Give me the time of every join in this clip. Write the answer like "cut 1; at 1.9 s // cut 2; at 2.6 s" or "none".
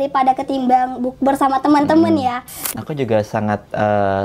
cut 1; at 2.7 s